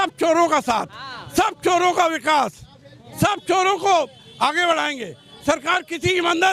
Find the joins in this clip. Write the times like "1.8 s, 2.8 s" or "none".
none